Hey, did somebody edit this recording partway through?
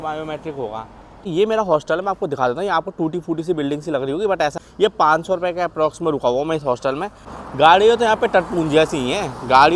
yes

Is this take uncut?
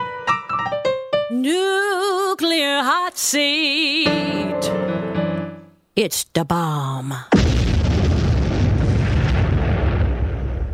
yes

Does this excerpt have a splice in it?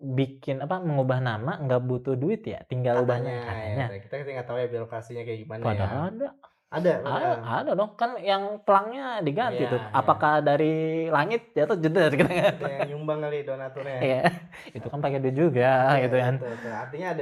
no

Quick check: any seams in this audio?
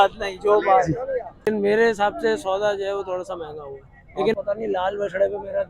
yes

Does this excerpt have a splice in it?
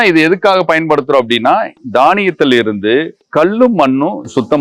no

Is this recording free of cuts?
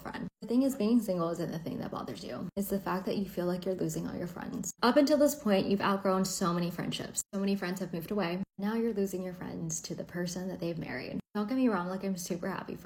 yes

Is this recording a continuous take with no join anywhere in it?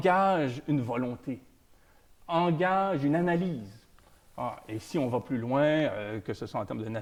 yes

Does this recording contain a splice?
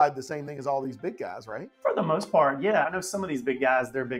yes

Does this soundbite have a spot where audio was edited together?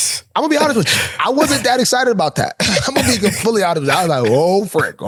no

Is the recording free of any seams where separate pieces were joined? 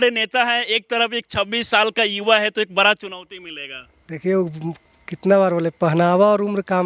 yes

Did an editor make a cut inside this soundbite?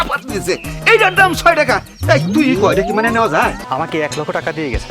yes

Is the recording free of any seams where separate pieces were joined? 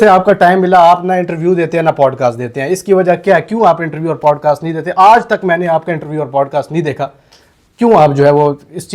yes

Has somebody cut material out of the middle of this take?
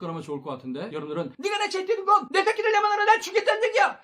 yes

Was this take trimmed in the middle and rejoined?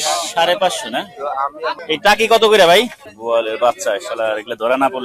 yes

